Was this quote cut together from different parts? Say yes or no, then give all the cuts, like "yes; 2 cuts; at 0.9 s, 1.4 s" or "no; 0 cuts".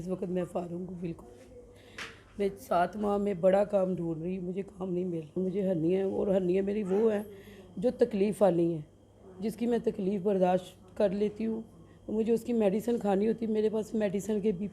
yes; 1 cut; at 5.4 s